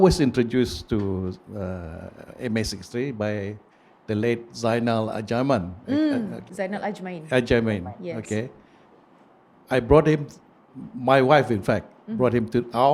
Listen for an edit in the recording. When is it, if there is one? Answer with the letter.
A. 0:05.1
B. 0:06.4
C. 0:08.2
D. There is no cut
B